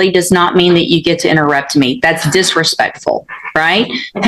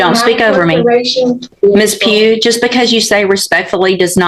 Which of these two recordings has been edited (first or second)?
second